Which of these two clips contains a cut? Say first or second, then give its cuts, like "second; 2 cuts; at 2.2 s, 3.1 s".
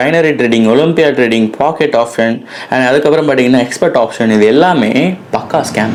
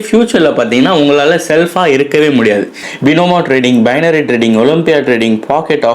second; 1 cut; at 2.8 s